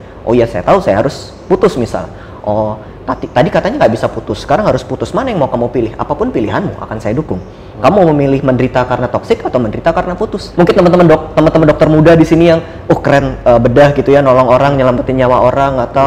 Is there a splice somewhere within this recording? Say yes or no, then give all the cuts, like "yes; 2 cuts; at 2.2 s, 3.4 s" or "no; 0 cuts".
yes; 1 cut; at 10.4 s